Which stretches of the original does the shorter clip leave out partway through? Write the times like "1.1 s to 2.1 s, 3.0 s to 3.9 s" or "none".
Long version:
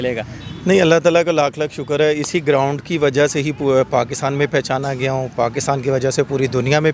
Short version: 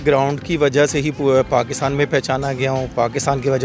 none